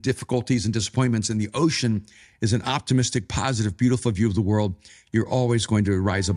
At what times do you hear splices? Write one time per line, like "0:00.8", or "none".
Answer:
none